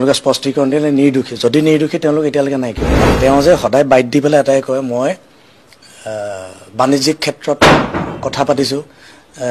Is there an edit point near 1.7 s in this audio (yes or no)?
no